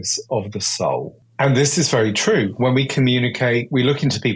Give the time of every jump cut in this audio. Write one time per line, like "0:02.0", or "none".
0:01.2